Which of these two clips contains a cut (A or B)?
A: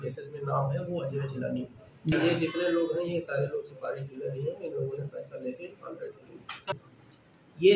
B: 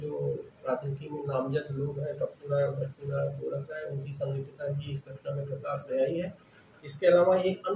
A